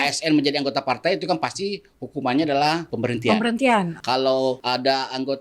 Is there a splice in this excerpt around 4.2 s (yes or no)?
yes